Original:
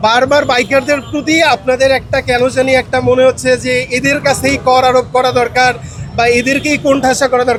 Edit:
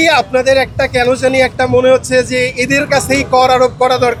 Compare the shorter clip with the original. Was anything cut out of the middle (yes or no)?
no